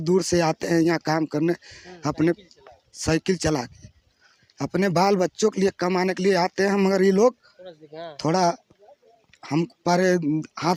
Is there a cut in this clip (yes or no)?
no